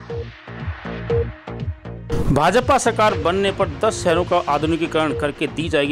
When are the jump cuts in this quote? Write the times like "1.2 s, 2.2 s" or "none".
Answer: 2.2 s